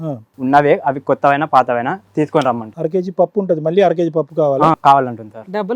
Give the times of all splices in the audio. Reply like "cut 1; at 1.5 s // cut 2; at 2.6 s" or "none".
none

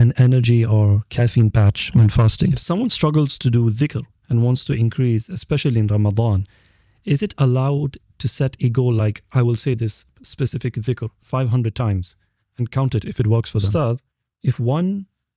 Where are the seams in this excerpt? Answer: cut 1; at 2.6 s // cut 2; at 13.7 s

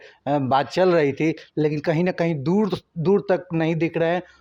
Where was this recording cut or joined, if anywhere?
none

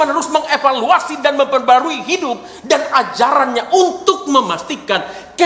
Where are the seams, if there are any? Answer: none

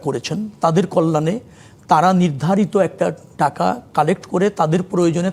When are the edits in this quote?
none

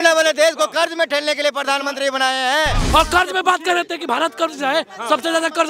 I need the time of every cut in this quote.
cut 1; at 2.8 s

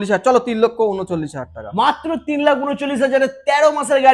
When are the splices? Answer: none

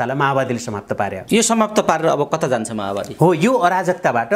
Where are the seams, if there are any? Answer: cut 1; at 1.2 s

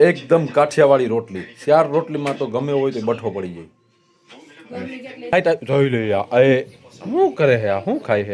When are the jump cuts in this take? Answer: cut 1; at 5.3 s

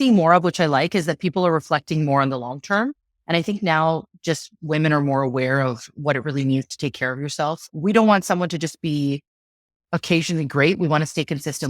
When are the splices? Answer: cut 1; at 7.6 s

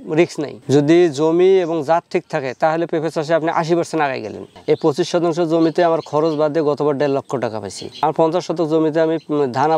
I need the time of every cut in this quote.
cut 1; at 4.4 s // cut 2; at 8.0 s

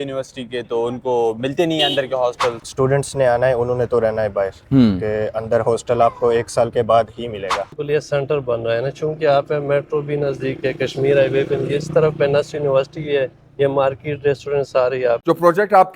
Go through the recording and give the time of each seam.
cut 1; at 2.6 s // cut 2; at 7.8 s // cut 3; at 15.2 s

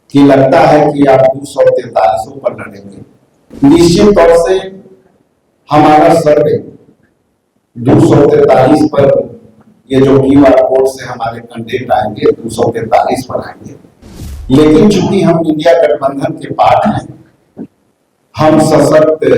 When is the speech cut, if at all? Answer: cut 1; at 3.5 s

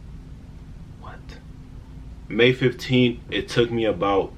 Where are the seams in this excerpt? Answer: cut 1; at 2.4 s

